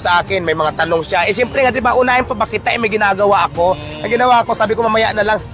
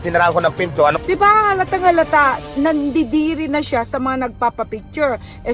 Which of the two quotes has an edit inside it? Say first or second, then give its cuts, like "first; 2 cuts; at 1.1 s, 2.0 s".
second; 1 cut; at 0.9 s